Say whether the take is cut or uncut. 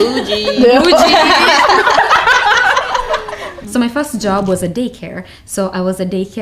cut